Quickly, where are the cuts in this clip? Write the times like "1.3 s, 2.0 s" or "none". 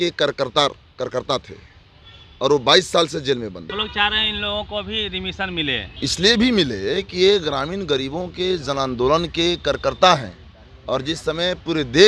3.8 s, 5.9 s